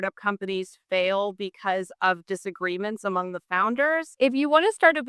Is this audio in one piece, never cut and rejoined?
no; 1 cut; at 4.1 s

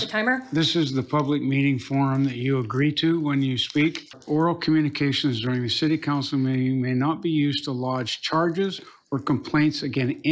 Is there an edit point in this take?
yes; 1 cut; at 4.2 s

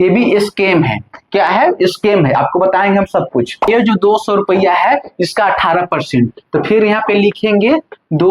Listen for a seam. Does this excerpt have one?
yes; 1 cut; at 3.7 s

